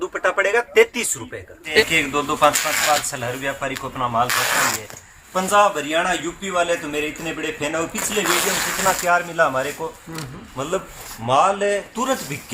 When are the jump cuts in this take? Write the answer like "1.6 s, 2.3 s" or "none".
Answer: 1.8 s